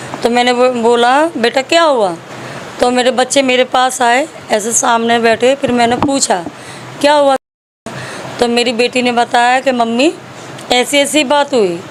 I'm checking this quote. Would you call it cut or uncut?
uncut